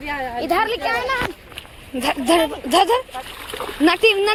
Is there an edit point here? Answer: no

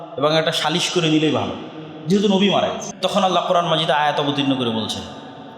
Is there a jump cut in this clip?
yes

